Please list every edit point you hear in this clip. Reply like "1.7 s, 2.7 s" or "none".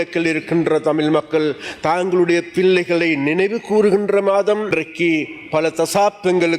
4.7 s